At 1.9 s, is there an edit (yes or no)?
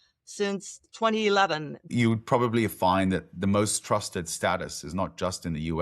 yes